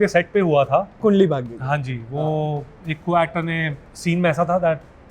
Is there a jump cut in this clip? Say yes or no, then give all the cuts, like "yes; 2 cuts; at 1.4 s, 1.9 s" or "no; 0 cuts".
yes; 2 cuts; at 1.0 s, 3.9 s